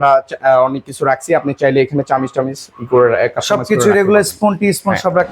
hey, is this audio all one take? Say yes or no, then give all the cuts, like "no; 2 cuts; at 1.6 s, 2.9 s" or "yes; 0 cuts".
yes; 0 cuts